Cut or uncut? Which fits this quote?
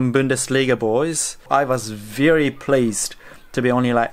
cut